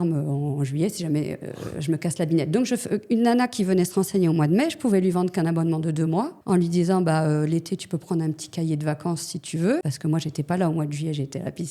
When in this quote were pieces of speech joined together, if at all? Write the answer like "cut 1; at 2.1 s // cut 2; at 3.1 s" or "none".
cut 1; at 6.4 s // cut 2; at 9.9 s

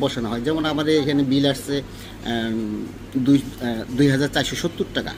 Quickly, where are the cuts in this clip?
none

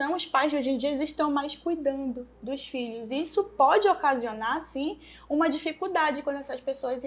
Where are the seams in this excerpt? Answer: none

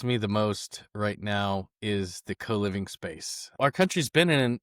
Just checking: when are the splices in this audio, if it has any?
cut 1; at 3.4 s

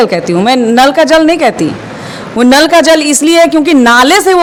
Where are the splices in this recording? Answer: none

